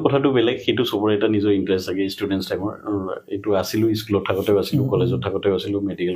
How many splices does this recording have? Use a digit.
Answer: 0